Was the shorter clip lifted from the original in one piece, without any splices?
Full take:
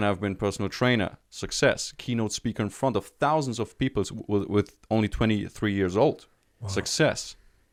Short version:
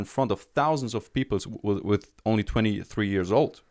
yes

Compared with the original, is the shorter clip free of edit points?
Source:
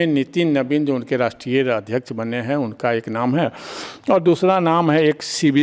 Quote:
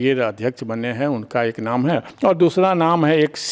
no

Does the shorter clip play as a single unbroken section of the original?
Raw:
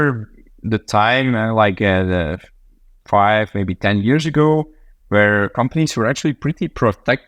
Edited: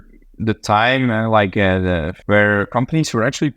no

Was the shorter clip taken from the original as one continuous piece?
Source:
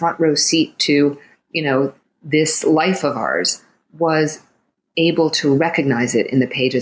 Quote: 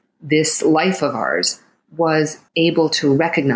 no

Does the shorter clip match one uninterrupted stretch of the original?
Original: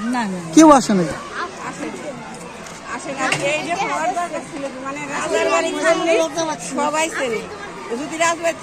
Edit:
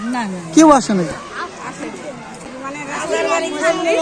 no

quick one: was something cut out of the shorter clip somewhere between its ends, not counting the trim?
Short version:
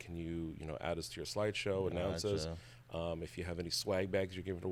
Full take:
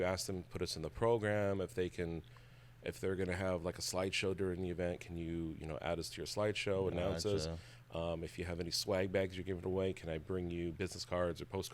no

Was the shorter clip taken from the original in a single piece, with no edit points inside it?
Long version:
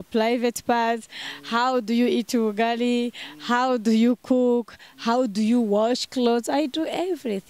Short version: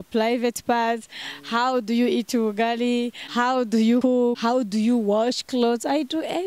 no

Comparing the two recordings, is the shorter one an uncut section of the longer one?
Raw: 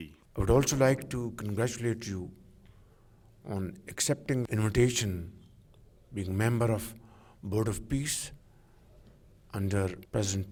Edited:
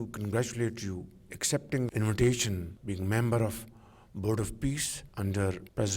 no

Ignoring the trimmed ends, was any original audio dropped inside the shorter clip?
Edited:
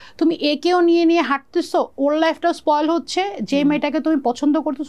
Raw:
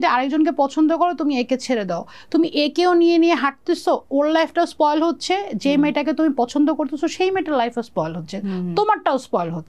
no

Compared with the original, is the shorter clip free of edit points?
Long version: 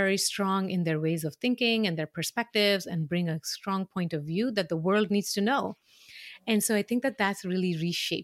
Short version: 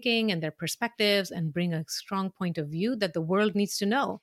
yes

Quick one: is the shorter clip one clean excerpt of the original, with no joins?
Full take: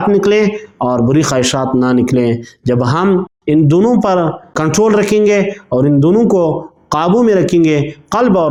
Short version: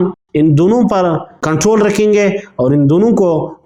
yes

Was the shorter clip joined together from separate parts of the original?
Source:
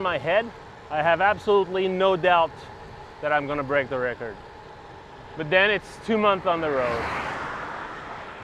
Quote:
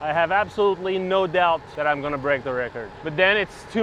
yes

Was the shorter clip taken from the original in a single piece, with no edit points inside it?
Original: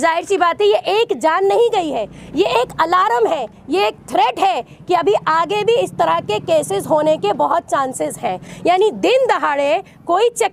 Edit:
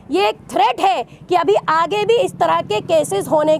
yes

